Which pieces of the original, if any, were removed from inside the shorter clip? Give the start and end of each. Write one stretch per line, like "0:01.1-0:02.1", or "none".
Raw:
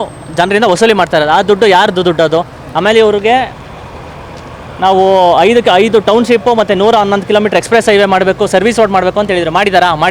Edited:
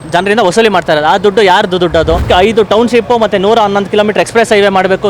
0:02.5-0:05.6